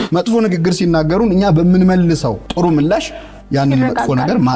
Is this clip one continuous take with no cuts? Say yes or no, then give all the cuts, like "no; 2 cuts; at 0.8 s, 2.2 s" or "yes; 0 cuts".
yes; 0 cuts